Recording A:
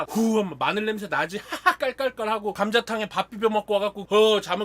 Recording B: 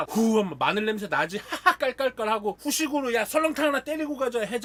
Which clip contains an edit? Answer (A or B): A